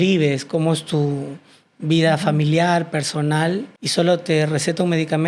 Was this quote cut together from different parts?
yes; 1 cut; at 3.8 s

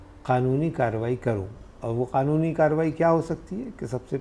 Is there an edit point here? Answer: no; 0 cuts

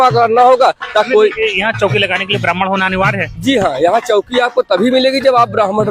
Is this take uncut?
no; 1 cut; at 1.1 s

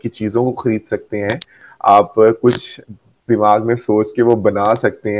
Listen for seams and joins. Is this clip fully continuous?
yes; 0 cuts

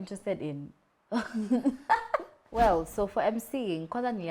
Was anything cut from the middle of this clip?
yes; 1 cut; at 2.4 s

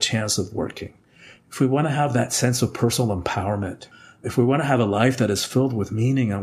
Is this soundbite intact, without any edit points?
no; 1 cut; at 3.8 s

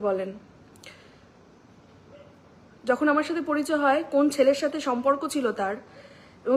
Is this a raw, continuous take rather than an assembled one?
yes; 0 cuts

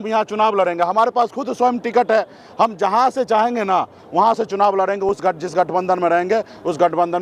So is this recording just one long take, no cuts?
yes; 0 cuts

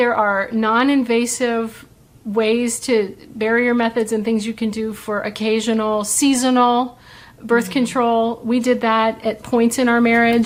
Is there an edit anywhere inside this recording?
no; 0 cuts

